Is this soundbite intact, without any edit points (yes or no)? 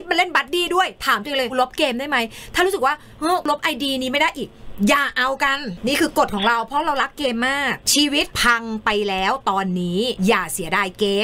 no